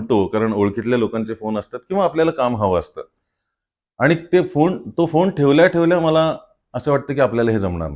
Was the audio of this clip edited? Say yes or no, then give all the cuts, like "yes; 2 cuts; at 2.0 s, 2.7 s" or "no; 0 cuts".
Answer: no; 0 cuts